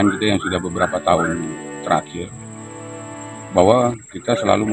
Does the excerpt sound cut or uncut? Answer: uncut